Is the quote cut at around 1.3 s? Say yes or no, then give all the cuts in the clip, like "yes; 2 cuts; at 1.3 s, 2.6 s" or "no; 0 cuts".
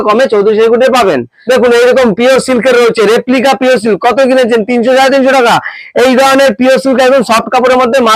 yes; 1 cut; at 1.3 s